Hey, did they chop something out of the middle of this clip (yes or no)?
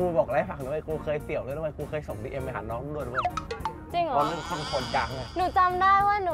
yes